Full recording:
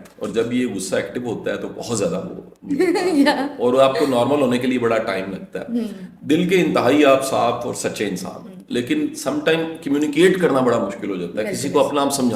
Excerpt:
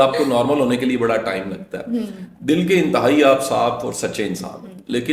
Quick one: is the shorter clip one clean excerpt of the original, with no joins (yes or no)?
yes